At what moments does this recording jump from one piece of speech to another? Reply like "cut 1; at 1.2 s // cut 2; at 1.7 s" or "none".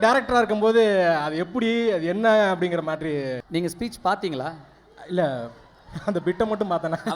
cut 1; at 3.4 s